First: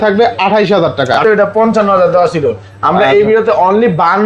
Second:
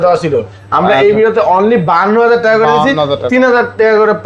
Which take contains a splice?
first; 1 cut; at 1.2 s

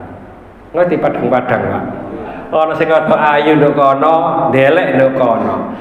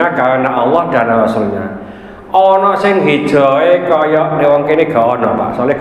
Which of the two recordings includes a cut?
first; 1 cut; at 2.3 s

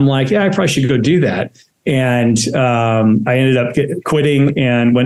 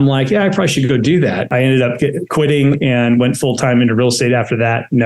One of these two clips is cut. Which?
second; 1 cut; at 1.5 s

